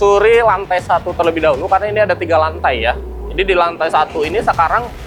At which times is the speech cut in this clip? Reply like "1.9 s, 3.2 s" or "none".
none